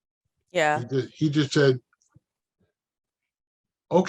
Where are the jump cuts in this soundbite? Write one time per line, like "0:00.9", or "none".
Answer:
none